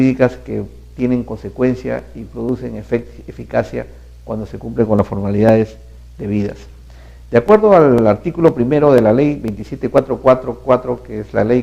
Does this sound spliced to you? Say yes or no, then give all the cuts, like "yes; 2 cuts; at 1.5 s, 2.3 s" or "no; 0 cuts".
yes; 1 cut; at 4.9 s